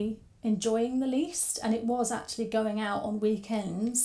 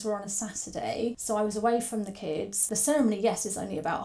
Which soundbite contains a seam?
second; 2 cuts; at 1.2 s, 2.6 s

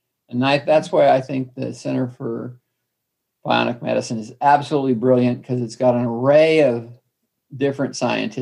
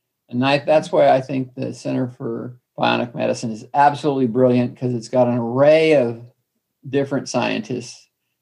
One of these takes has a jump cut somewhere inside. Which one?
second; 1 cut; at 2.6 s

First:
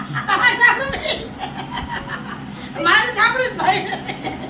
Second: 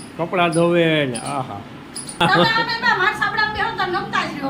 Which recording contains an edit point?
second; 1 cut; at 2.2 s

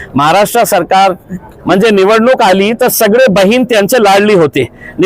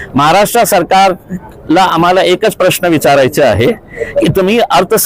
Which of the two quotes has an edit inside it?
first; 1 cut; at 1.5 s

